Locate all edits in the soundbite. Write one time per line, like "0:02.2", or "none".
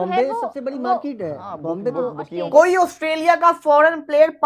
0:02.4